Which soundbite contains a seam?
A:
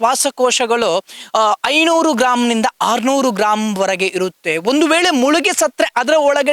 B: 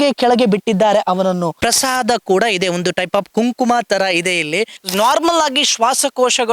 B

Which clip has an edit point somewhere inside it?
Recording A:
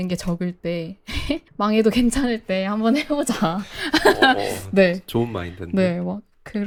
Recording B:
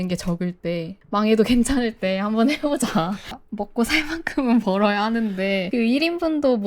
B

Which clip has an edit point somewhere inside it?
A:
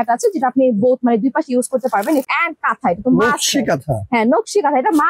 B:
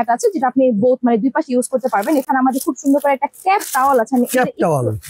A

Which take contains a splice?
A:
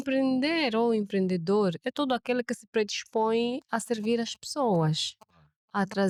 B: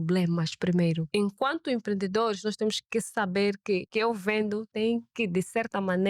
B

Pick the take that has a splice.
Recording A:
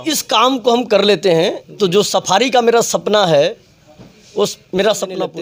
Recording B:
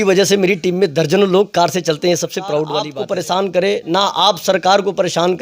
B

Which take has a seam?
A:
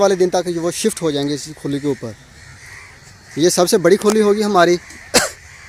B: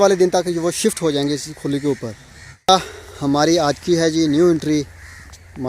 B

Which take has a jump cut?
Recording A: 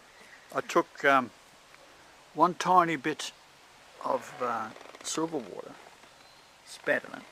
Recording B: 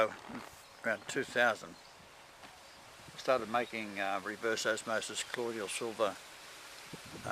B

